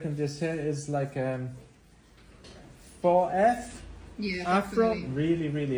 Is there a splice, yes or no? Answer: no